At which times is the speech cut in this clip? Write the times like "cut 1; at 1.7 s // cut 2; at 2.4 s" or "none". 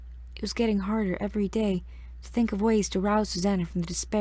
cut 1; at 2.4 s